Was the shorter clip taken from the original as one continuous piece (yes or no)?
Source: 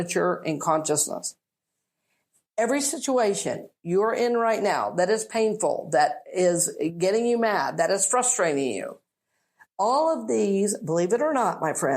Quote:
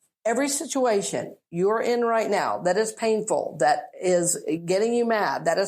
yes